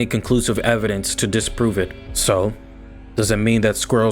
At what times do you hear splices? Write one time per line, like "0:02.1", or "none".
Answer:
0:02.1